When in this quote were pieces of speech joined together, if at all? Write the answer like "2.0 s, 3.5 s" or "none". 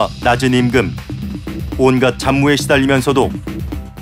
none